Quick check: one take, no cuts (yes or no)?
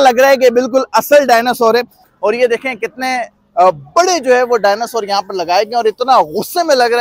no